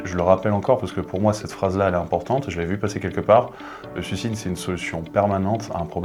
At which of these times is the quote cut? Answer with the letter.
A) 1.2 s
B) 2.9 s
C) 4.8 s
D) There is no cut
D